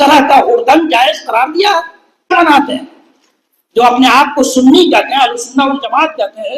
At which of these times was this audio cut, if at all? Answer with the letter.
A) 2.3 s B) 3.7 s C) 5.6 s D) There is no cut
A